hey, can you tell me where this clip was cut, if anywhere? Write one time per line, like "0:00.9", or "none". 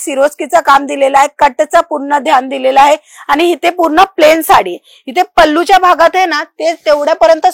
none